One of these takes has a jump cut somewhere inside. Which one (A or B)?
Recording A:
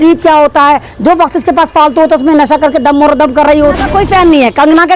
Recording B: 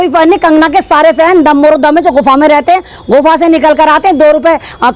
A